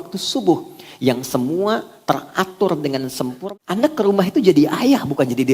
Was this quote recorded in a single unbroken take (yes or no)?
no